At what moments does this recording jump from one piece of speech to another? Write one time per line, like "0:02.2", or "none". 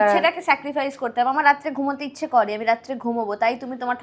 none